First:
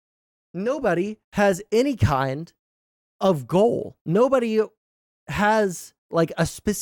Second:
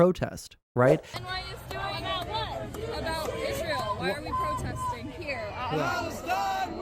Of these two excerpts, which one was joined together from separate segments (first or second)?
second